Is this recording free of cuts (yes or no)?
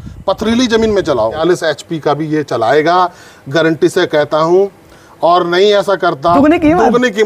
no